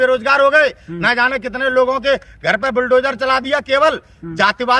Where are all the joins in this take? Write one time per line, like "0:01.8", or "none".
none